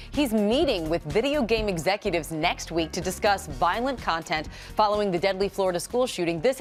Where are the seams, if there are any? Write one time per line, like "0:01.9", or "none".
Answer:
none

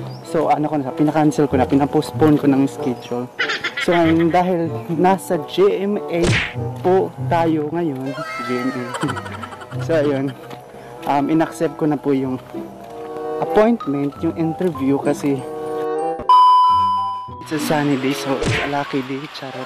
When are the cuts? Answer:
0:16.1

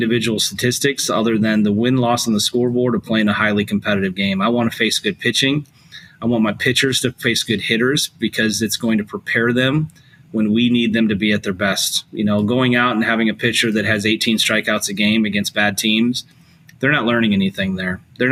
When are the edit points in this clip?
none

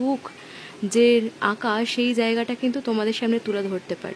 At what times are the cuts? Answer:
none

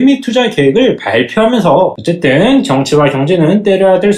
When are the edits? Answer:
0:02.0

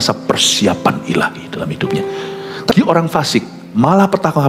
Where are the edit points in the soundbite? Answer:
0:02.7

